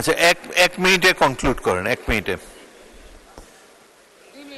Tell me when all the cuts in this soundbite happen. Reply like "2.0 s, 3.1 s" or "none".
none